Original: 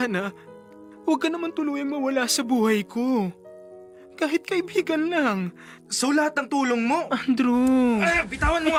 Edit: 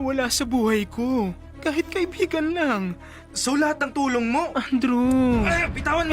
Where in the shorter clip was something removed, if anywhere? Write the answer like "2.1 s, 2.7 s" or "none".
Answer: 1.5 s